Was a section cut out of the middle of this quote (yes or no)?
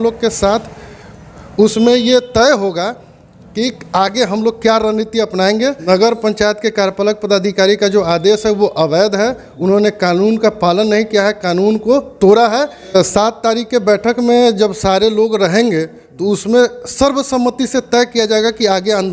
yes